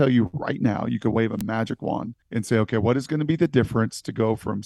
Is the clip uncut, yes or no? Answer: no